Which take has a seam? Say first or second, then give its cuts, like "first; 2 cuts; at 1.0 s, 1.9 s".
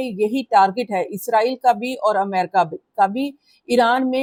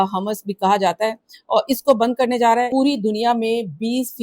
second; 1 cut; at 2.7 s